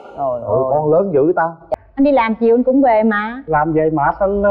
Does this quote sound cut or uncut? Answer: cut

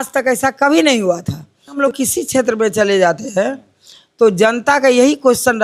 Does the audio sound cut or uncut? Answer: cut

